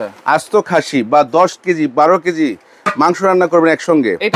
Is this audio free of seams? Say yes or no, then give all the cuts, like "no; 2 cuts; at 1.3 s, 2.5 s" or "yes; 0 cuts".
yes; 0 cuts